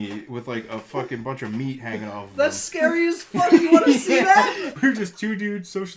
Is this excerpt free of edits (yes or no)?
no